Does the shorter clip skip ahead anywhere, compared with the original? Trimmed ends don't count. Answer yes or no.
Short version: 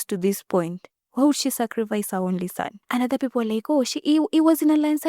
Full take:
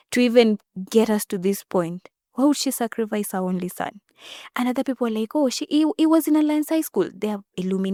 yes